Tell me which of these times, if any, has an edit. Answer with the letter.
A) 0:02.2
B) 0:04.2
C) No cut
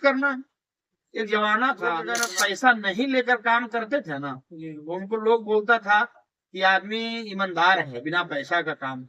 A